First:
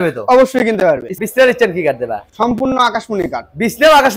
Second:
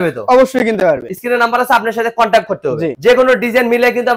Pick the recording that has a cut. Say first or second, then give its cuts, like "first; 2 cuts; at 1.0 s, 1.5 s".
first; 1 cut; at 1.1 s